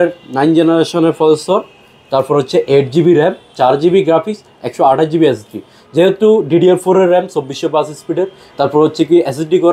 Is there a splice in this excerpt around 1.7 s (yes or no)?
no